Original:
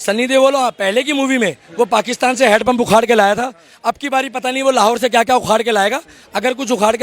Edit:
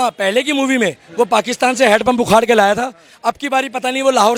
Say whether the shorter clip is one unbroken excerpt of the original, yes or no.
yes